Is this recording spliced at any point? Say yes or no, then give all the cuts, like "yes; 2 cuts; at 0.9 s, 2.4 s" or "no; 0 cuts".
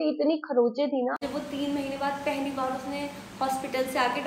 yes; 1 cut; at 1.3 s